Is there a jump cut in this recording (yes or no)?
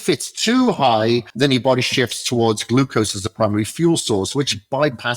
yes